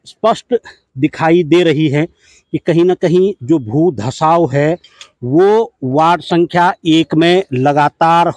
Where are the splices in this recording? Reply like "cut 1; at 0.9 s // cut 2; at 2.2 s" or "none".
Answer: none

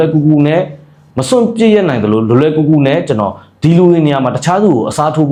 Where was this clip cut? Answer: none

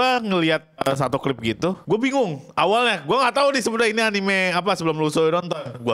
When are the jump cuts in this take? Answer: cut 1; at 0.8 s // cut 2; at 1.8 s

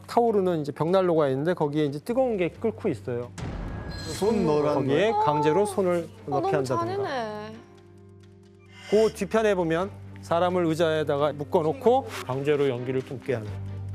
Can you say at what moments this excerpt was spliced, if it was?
none

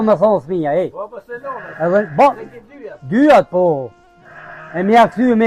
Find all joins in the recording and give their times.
none

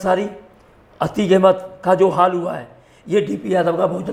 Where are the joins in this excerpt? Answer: none

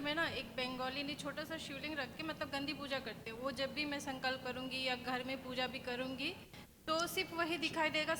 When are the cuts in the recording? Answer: none

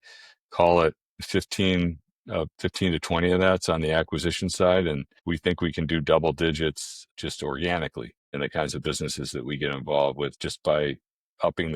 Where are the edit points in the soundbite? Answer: cut 1; at 5.1 s // cut 2; at 7.0 s // cut 3; at 8.3 s

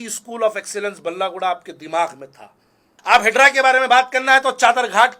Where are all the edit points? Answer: cut 1; at 2.6 s

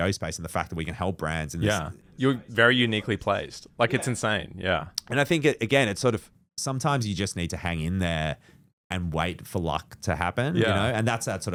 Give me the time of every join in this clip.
none

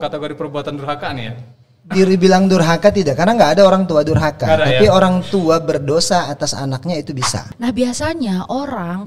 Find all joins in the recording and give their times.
cut 1; at 7.4 s

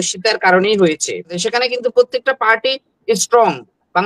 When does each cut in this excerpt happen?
cut 1; at 1.4 s

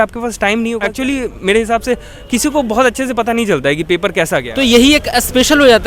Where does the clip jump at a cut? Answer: cut 1; at 0.8 s // cut 2; at 4.5 s

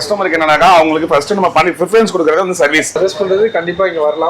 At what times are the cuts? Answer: cut 1; at 2.9 s

